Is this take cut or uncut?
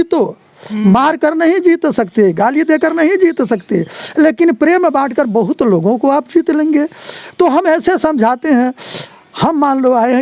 uncut